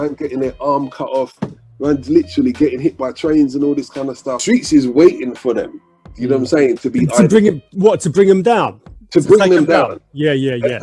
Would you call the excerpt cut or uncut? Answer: cut